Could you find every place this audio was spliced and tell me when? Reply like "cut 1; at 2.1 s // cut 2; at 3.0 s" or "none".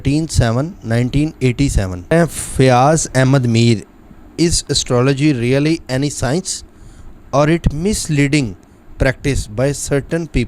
cut 1; at 2.1 s